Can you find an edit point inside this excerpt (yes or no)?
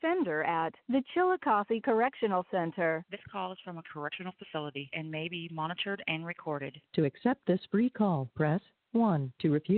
no